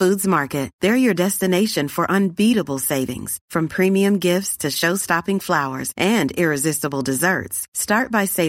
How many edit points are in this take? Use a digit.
0